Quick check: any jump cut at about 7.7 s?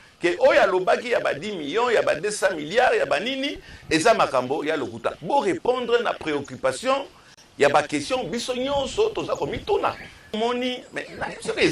no; 1 cut; at 10.4 s

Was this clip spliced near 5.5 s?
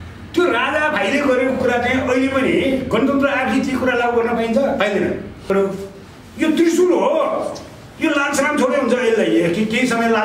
yes; 1 cut; at 5.5 s

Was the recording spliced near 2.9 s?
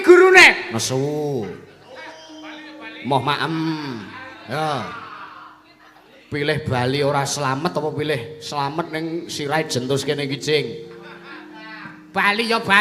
yes; 1 cut; at 2.9 s

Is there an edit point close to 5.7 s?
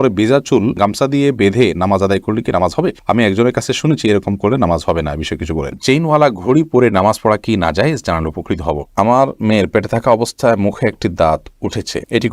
yes; 2 cuts; at 5.7 s, 8.9 s

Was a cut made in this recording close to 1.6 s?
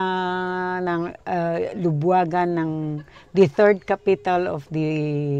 no; 0 cuts

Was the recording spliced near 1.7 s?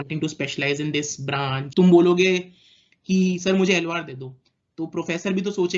yes; 1 cut; at 1.7 s

